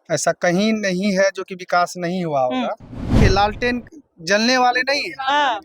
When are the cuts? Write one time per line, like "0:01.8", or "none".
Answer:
0:03.2